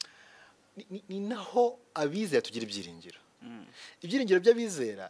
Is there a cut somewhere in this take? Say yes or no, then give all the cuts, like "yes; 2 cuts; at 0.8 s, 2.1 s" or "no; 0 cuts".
no; 0 cuts